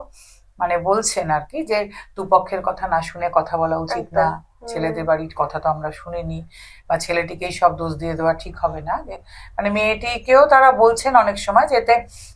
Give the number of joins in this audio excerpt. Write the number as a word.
zero